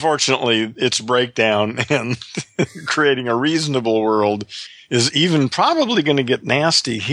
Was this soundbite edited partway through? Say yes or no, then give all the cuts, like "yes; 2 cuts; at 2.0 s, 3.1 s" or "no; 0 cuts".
no; 0 cuts